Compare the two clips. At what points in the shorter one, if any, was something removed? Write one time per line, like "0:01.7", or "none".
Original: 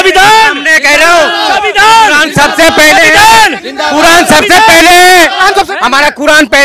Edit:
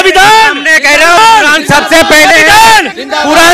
0:01.2